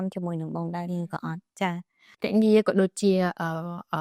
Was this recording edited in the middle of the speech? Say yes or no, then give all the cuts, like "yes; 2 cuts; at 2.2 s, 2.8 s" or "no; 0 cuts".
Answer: yes; 1 cut; at 2.1 s